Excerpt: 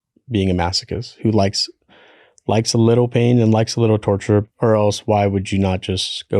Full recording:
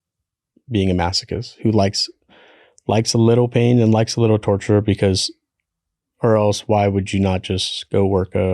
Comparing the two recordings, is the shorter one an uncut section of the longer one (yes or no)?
no